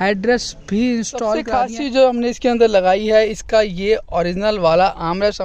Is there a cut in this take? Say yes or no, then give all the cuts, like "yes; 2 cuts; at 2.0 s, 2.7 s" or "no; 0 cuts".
yes; 1 cut; at 1.4 s